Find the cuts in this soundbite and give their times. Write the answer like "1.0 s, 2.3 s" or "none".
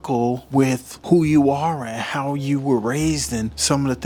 none